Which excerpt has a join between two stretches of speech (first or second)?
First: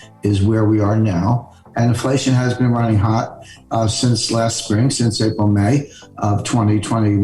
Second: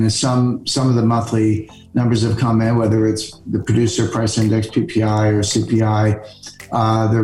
first